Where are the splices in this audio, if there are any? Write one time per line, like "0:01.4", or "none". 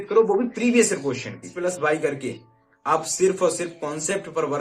0:01.5